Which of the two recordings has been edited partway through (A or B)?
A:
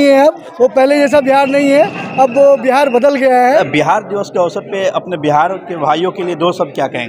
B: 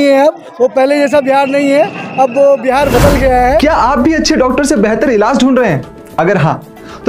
B